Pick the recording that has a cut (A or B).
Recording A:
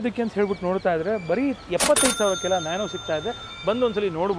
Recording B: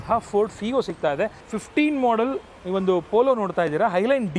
B